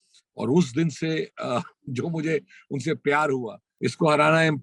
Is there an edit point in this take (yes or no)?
yes